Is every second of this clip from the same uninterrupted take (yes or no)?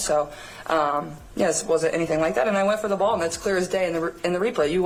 yes